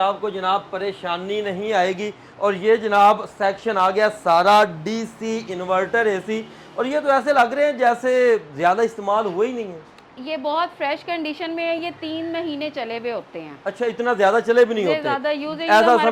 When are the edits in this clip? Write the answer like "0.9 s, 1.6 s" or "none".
none